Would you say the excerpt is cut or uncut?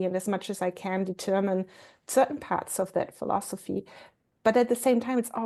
uncut